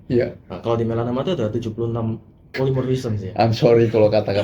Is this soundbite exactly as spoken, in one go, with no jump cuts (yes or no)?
no